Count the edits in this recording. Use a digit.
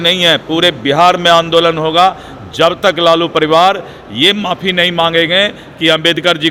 0